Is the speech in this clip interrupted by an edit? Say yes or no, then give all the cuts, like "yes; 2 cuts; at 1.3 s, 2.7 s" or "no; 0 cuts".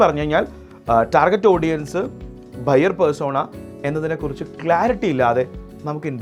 no; 0 cuts